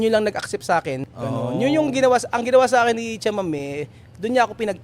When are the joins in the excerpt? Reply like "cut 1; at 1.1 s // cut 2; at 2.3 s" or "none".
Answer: cut 1; at 1.0 s